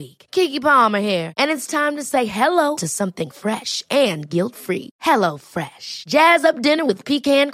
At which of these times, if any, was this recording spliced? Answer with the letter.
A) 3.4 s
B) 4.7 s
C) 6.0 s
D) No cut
D